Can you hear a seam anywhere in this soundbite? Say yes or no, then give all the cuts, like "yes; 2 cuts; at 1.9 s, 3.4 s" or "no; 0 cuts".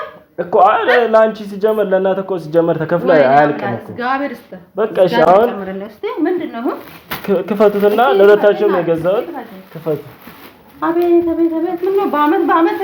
no; 0 cuts